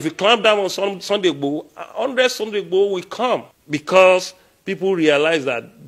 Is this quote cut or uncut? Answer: cut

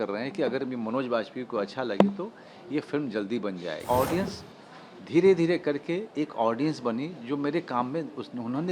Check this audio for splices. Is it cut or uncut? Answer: cut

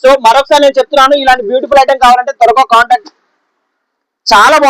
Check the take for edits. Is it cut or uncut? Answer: cut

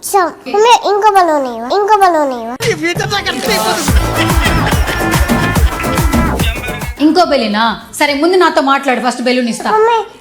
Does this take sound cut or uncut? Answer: uncut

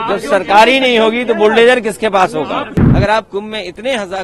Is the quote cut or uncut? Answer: cut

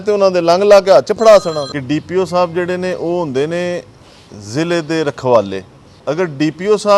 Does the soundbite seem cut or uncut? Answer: cut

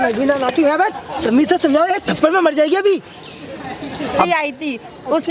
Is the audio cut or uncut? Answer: cut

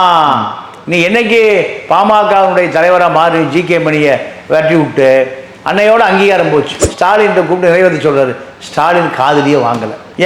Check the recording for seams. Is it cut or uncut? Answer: cut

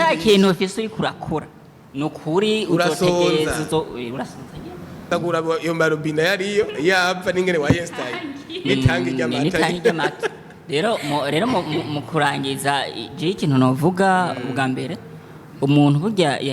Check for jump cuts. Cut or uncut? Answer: cut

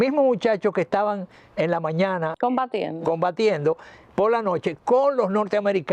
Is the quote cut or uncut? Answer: uncut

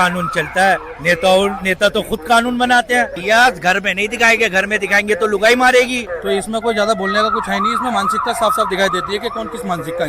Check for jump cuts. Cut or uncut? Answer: cut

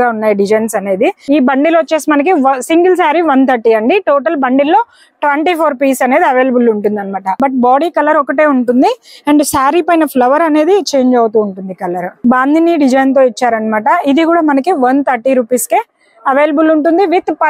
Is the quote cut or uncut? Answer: cut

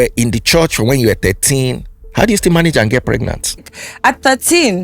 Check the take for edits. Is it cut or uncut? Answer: cut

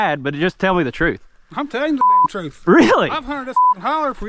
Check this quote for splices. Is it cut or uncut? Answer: uncut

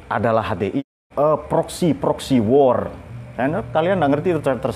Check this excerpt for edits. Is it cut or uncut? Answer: cut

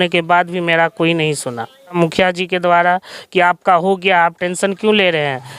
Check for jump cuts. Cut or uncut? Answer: cut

